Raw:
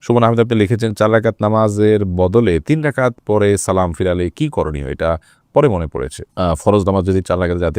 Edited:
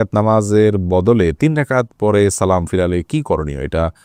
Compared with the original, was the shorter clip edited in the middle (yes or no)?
no